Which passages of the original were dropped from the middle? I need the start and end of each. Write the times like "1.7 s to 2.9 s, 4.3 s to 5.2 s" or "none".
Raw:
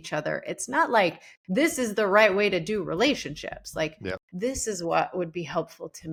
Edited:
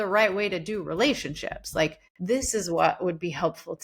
4.1 s to 4.2 s